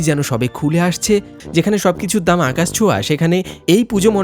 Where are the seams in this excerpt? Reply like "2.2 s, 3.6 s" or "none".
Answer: 1.3 s